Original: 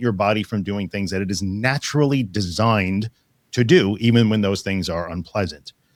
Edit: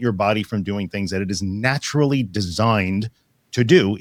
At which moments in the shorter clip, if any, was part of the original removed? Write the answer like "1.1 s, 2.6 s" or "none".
none